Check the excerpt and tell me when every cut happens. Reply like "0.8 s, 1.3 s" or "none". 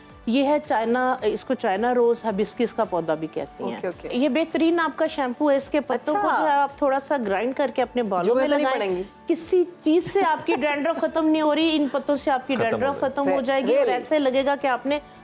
4.1 s

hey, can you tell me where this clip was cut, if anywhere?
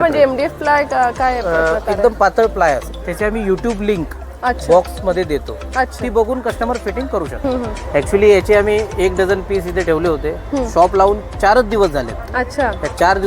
3.0 s, 7.3 s

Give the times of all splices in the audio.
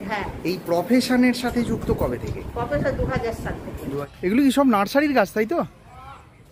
4.0 s

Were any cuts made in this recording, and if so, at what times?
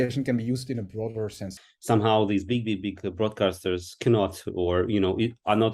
1.5 s

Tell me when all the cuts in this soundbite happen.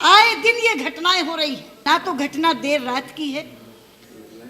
1.9 s

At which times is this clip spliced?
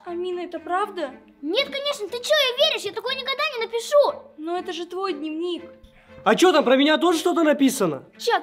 none

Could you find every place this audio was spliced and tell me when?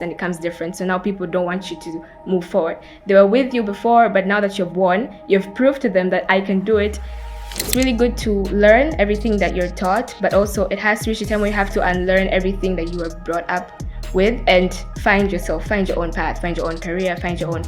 7.7 s

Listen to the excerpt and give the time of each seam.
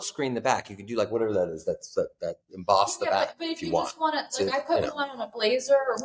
none

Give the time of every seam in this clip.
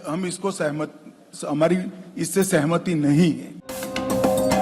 none

